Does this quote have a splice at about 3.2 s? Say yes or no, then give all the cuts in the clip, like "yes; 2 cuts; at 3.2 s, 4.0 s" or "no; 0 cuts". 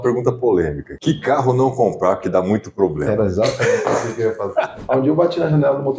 no; 2 cuts; at 1.0 s, 4.8 s